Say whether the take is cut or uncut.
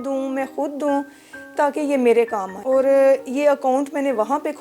cut